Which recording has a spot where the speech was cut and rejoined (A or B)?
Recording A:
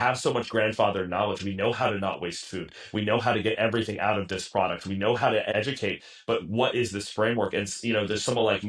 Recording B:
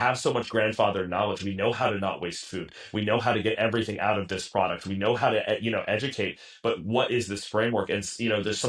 A